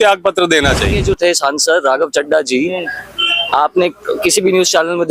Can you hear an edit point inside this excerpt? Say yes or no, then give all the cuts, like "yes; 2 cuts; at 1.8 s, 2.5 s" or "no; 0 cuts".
yes; 1 cut; at 0.9 s